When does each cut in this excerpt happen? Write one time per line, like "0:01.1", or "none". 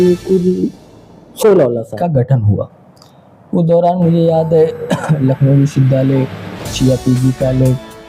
0:01.9